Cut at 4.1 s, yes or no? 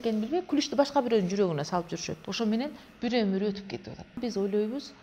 yes